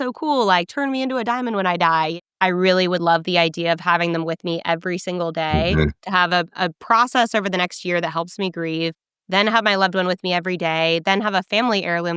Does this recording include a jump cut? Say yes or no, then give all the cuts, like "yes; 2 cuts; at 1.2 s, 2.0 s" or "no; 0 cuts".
yes; 1 cut; at 2.2 s